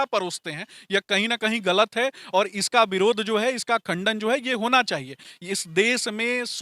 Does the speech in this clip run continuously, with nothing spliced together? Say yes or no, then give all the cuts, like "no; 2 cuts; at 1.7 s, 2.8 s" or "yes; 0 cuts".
yes; 0 cuts